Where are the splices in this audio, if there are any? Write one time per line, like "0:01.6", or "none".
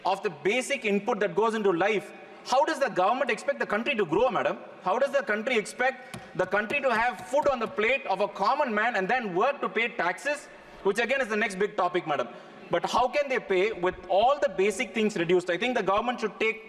none